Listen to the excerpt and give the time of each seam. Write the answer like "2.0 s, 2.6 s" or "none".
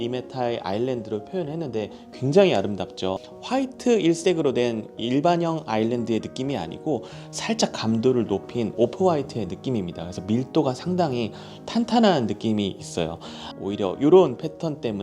3.3 s, 13.4 s